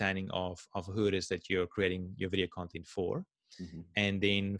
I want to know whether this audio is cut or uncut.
uncut